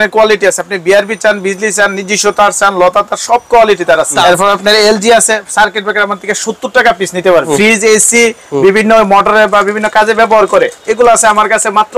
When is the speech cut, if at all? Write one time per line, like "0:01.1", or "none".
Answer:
0:04.2
0:07.5